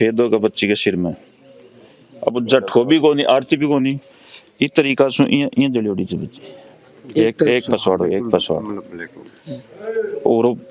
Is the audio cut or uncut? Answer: uncut